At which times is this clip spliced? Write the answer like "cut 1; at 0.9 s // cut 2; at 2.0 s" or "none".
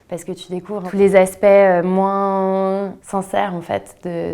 cut 1; at 0.9 s // cut 2; at 3.0 s